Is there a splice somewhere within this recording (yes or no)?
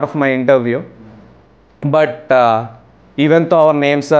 no